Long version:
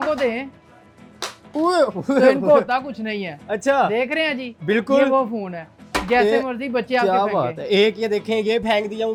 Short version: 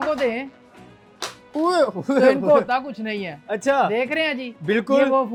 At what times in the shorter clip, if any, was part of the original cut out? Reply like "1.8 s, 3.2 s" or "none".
none